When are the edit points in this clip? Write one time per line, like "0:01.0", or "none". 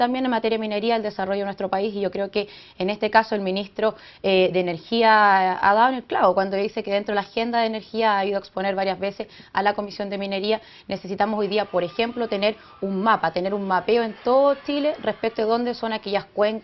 0:03.6